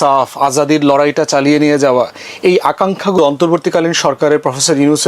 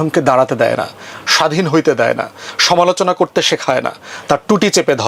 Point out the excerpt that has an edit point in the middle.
first; 1 cut; at 3.2 s

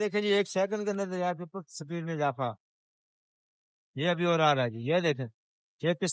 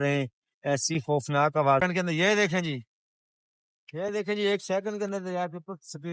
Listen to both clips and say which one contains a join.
second; 1 cut; at 1.8 s

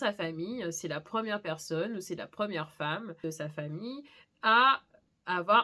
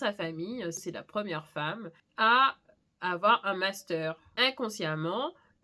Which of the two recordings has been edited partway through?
second; 3 cuts; at 0.8 s, 1.9 s, 4.3 s

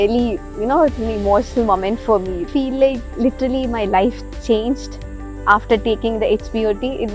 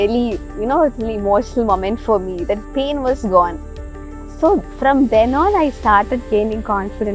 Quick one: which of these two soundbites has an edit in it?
first; 1 cut; at 2.5 s

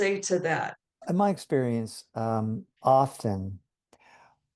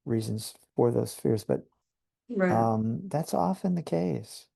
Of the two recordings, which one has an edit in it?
first; 2 cuts; at 1.0 s, 2.7 s

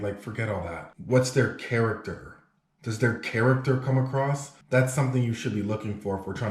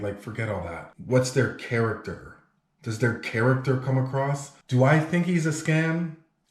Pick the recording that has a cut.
second; 1 cut; at 4.5 s

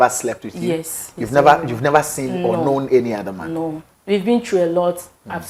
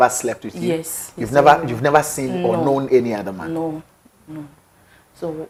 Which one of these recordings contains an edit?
first; 1 cut; at 3.9 s

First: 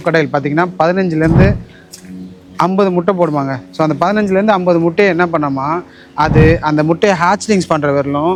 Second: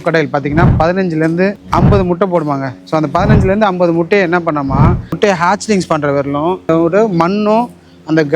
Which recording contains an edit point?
second; 3 cuts; at 1.6 s, 5.2 s, 6.6 s

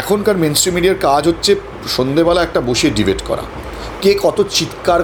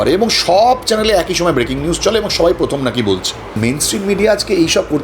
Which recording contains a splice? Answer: second; 1 cut; at 3.5 s

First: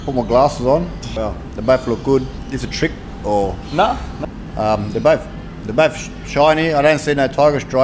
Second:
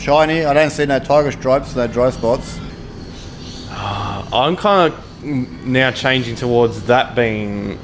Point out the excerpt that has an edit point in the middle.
second; 1 cut; at 2.7 s

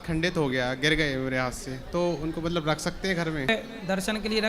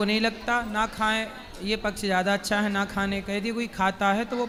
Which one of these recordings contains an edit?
first; 1 cut; at 3.5 s

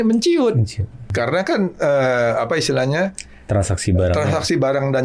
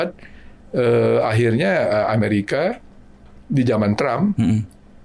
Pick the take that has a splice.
first; 1 cut; at 1.0 s

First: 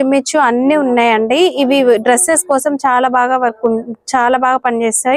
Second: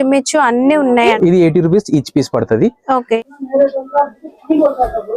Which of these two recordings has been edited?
second; 2 cuts; at 1.1 s, 3.2 s

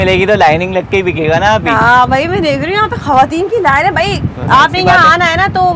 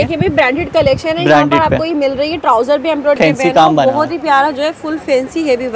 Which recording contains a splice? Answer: second; 1 cut; at 3.2 s

